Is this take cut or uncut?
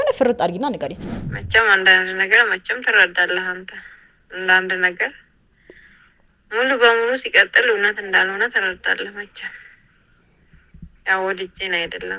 cut